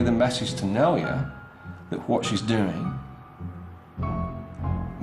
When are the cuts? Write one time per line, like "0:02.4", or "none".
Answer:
none

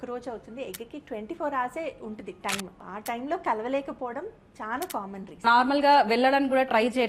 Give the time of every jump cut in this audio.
0:02.8
0:05.4

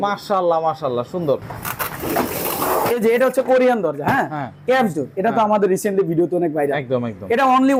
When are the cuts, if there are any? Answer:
none

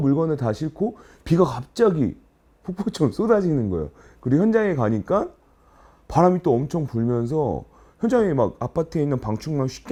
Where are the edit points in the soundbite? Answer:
none

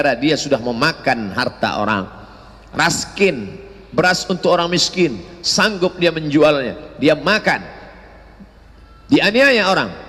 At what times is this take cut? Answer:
none

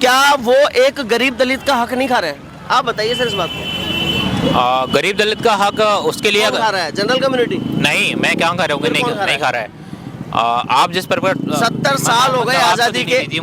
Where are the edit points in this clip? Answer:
none

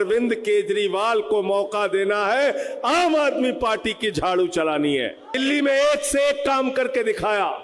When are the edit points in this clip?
0:05.3

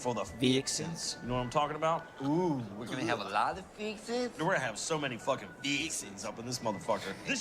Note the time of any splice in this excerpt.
0:03.1

